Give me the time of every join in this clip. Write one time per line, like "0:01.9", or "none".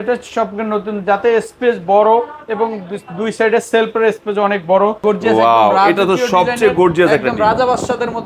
0:05.0